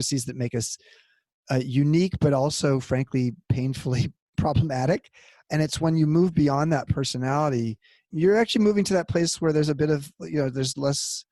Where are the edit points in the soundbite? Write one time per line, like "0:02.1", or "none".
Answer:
none